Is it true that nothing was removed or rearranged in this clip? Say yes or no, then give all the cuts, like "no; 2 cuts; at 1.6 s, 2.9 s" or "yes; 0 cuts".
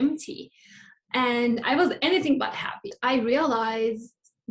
no; 1 cut; at 2.9 s